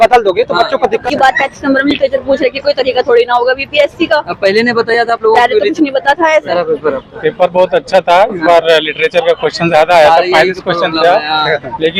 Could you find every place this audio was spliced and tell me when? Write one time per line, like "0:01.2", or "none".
0:00.9
0:06.4